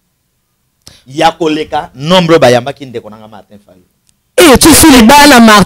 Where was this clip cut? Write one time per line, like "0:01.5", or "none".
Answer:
none